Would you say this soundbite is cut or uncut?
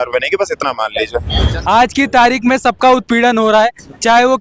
cut